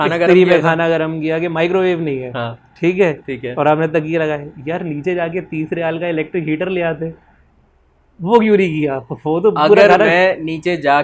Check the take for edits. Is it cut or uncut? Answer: uncut